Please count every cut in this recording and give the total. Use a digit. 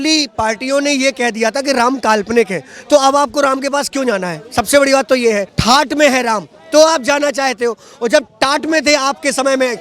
1